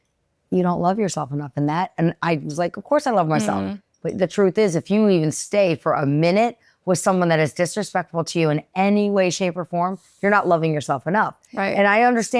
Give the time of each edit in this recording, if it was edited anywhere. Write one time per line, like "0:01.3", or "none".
none